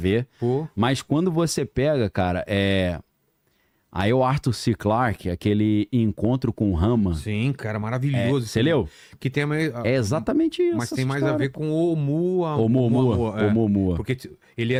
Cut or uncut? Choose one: uncut